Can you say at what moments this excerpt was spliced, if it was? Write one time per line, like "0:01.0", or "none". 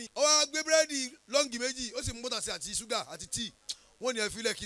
none